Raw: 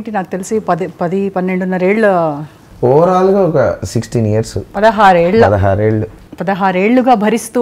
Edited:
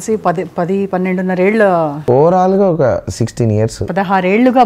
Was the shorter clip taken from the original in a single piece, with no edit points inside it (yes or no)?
no